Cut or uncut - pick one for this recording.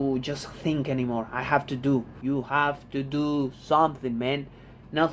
cut